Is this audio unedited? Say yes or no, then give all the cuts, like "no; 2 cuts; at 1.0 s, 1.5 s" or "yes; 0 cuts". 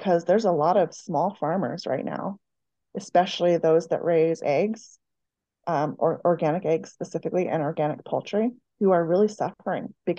no; 1 cut; at 8.6 s